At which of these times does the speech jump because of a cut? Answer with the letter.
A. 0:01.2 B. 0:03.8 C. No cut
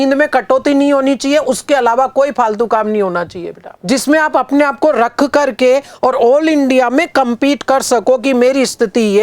B